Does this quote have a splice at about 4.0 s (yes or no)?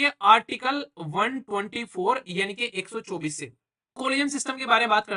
yes